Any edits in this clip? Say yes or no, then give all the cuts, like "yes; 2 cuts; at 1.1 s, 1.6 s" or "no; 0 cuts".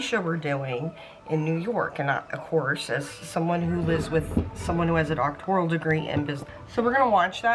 yes; 1 cut; at 6.4 s